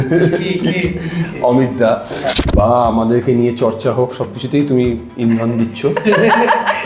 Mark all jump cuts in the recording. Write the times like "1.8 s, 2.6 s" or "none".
2.3 s